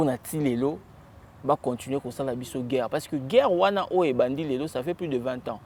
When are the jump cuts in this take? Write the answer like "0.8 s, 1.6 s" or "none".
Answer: none